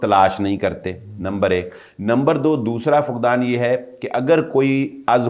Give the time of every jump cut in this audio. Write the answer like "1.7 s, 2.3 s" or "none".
none

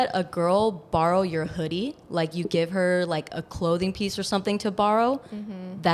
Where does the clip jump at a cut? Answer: none

